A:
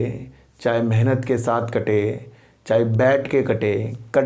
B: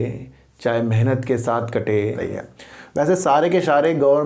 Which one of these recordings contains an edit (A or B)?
B